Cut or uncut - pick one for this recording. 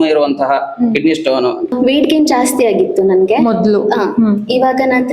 cut